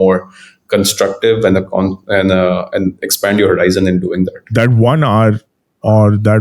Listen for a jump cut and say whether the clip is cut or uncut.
cut